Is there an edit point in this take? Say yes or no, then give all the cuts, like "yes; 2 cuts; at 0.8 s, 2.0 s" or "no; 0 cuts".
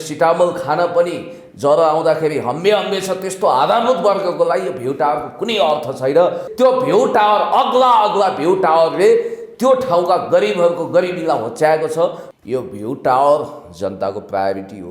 yes; 2 cuts; at 6.4 s, 12.2 s